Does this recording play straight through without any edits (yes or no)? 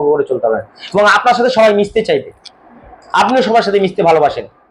yes